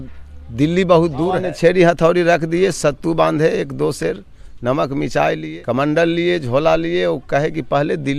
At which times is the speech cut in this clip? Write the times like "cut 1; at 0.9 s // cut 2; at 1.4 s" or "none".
cut 1; at 1.4 s // cut 2; at 5.5 s